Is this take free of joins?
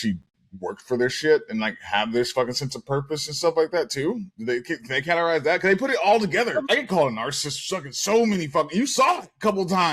no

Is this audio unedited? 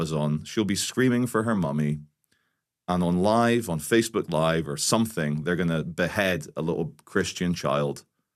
yes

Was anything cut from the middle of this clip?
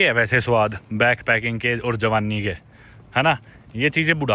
no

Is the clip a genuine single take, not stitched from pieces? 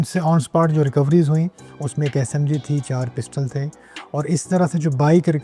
yes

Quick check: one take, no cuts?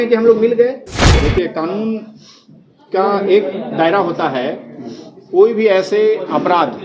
no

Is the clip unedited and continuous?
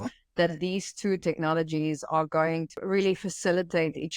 no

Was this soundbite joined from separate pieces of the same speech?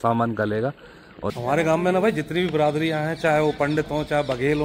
yes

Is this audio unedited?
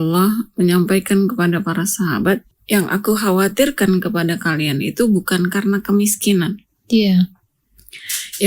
no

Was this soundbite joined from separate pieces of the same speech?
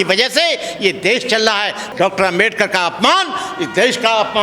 yes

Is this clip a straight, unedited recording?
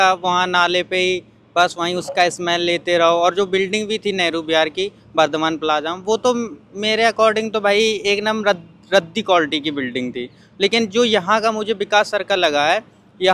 yes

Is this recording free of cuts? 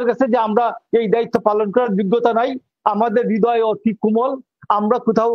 yes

